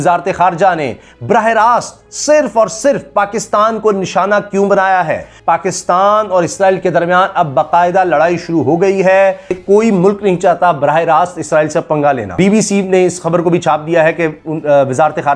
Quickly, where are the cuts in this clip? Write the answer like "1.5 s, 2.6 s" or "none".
5.3 s, 9.6 s, 12.3 s